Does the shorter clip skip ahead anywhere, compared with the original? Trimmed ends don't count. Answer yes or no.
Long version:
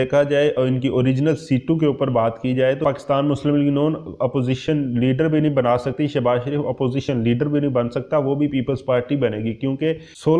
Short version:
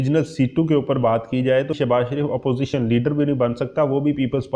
yes